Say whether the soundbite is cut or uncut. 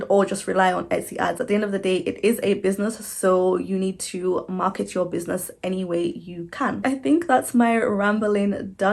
uncut